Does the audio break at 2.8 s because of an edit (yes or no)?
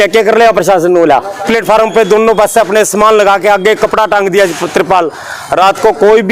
no